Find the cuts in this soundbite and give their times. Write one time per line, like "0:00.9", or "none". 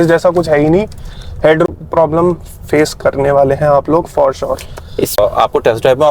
0:01.7
0:05.2